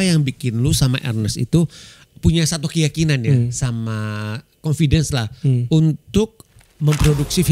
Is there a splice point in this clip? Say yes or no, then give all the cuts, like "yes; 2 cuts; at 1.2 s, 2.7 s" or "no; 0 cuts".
no; 0 cuts